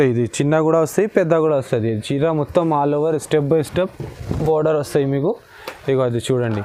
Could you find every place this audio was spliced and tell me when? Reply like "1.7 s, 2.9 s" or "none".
none